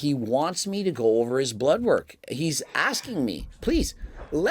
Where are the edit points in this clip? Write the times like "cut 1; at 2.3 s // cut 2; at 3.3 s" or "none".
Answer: cut 1; at 3.5 s

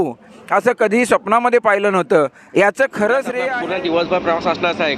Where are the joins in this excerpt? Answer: cut 1; at 3.4 s

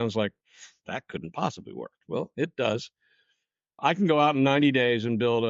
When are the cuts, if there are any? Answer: cut 1; at 3.8 s

